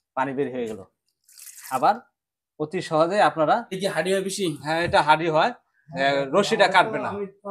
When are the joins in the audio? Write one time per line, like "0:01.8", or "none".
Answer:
0:03.7